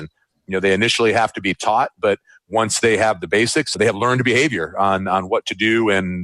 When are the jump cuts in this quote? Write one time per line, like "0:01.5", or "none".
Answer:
0:03.8